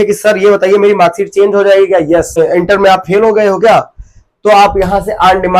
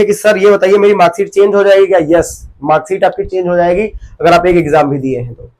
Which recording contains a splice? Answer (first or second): first